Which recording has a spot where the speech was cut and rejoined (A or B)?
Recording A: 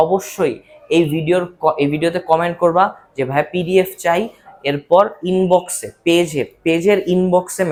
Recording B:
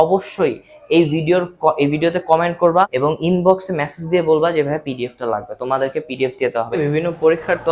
B